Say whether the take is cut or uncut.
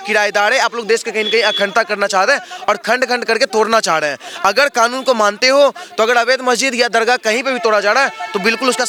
uncut